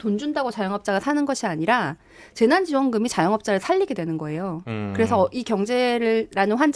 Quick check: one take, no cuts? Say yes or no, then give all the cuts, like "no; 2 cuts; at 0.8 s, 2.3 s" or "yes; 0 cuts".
yes; 0 cuts